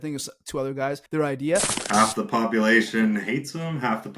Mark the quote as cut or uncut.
cut